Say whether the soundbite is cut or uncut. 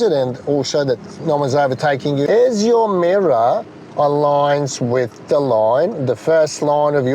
cut